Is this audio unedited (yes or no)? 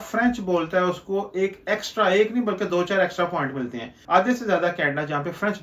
yes